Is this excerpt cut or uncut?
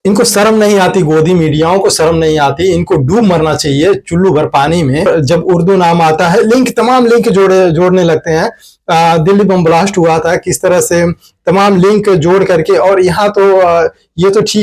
cut